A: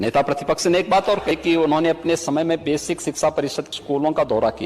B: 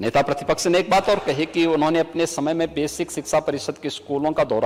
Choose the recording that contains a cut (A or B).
A